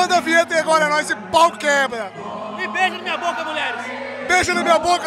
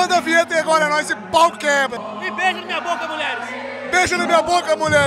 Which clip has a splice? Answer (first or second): second